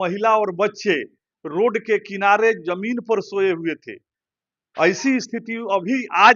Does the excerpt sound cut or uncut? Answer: uncut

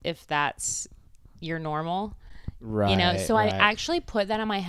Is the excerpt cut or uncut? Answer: uncut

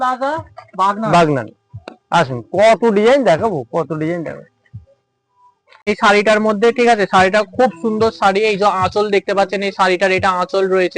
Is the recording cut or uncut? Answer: cut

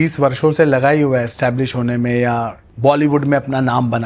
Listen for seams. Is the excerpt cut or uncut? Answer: cut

